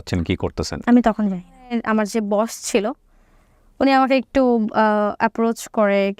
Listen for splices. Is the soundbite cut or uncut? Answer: cut